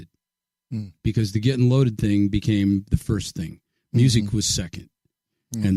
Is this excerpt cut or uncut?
uncut